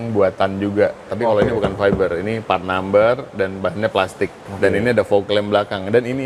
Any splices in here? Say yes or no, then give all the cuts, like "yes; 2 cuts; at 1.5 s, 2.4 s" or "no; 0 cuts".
yes; 2 cuts; at 1.1 s, 4.4 s